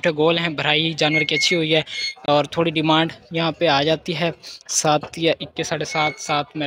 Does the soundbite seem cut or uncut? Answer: uncut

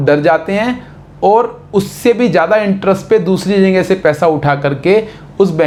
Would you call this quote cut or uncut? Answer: uncut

